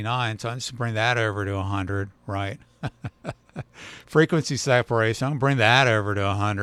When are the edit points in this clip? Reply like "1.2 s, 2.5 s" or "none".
none